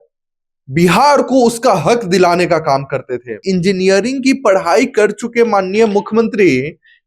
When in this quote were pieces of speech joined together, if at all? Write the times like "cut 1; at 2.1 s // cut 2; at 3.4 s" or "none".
cut 1; at 3.3 s